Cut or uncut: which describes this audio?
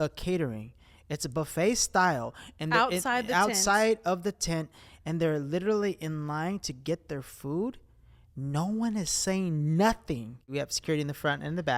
cut